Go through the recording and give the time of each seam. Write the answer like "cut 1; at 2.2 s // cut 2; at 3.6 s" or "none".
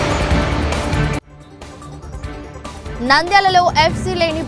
cut 1; at 1.2 s // cut 2; at 3.0 s

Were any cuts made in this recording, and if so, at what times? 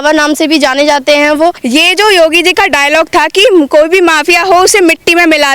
cut 1; at 1.6 s

